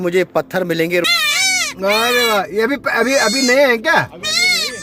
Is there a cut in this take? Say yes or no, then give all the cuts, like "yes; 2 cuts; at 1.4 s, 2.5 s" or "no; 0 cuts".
yes; 1 cut; at 1.0 s